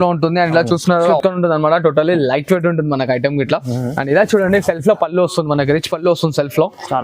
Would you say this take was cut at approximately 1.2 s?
yes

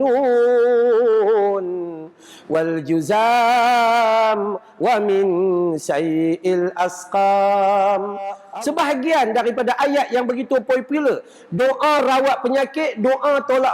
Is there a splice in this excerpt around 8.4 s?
yes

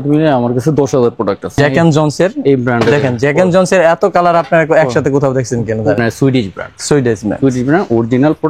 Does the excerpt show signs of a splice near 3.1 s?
no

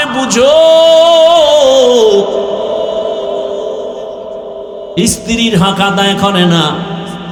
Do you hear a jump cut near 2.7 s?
no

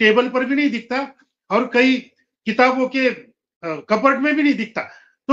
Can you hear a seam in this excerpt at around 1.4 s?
no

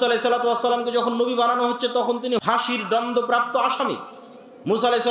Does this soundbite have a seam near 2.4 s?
yes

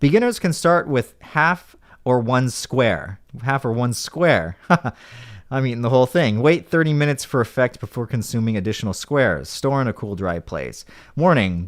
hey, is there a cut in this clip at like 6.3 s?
no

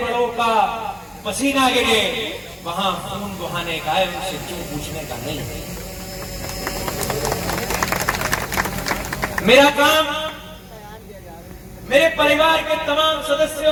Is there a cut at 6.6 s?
no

